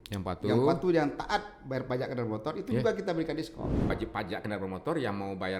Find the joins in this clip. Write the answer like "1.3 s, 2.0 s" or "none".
3.9 s